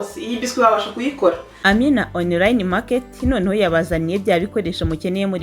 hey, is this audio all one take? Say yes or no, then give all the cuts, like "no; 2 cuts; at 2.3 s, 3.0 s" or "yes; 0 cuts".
no; 1 cut; at 1.5 s